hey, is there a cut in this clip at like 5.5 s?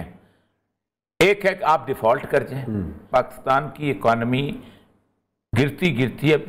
no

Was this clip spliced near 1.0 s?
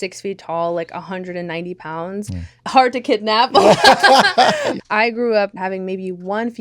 no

